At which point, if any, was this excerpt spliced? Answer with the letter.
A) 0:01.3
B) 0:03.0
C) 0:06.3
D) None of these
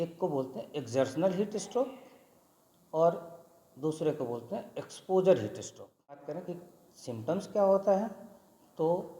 C